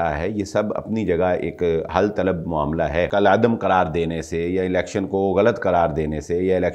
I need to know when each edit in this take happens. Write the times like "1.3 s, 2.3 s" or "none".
3.1 s